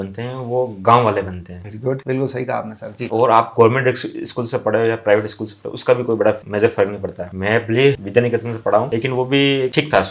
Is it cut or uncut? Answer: uncut